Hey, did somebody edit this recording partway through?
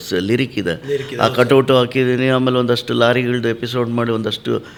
no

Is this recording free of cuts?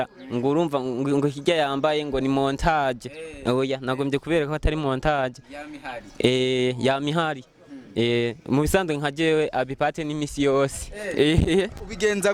yes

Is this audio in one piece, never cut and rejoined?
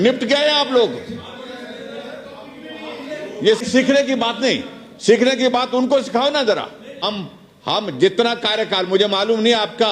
no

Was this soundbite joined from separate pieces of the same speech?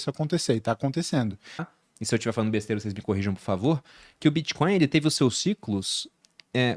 yes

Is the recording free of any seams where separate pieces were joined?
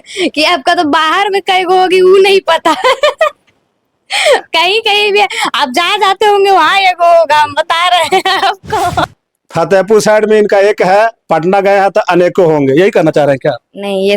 no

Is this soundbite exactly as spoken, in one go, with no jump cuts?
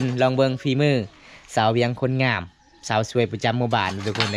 yes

